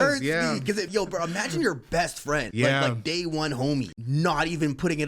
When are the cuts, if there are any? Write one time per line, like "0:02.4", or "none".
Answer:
0:00.9
0:02.5
0:04.0